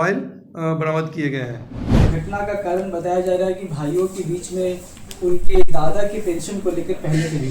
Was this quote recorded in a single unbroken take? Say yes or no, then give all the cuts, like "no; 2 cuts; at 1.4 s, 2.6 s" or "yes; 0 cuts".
no; 1 cut; at 2.0 s